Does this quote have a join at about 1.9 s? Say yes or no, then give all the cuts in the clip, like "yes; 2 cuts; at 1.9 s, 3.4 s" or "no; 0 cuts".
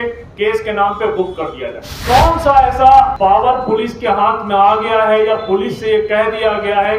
yes; 2 cuts; at 1.9 s, 3.1 s